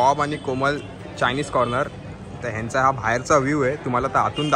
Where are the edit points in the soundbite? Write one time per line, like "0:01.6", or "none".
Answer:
none